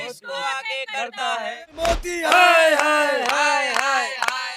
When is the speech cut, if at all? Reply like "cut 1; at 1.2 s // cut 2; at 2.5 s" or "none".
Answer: cut 1; at 1.7 s